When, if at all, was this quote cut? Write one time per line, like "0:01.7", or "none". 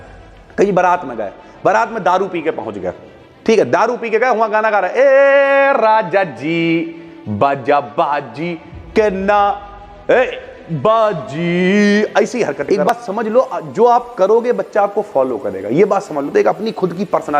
0:12.9